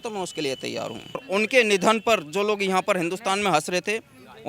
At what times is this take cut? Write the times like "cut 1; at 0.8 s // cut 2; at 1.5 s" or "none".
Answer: cut 1; at 1.2 s